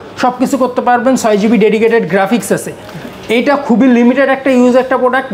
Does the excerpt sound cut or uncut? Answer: uncut